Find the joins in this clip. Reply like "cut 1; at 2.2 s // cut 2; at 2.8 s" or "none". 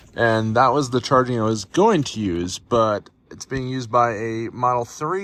none